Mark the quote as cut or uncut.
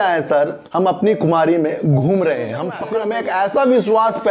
cut